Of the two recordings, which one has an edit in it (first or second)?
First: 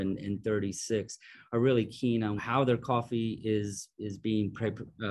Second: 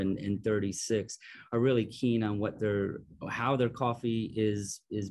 first